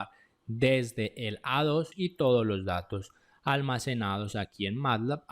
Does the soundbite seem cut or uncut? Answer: cut